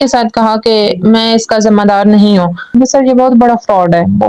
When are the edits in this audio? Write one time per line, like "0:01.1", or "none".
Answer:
0:02.7